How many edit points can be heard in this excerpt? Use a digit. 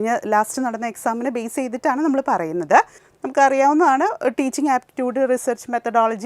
1